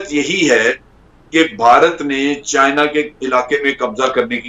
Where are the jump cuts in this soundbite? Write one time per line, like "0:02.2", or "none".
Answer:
none